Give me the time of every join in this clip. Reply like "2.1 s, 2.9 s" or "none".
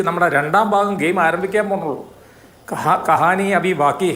none